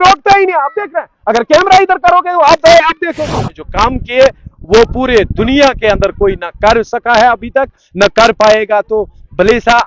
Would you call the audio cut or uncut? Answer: cut